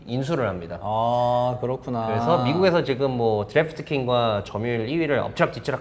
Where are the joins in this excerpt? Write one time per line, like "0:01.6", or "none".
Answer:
0:04.5